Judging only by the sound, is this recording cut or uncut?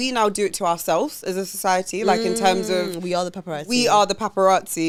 uncut